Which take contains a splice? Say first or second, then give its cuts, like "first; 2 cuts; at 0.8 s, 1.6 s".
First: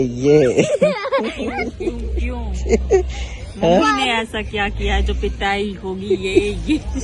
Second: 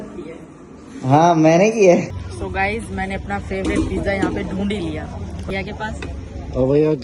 second; 2 cuts; at 2.1 s, 5.5 s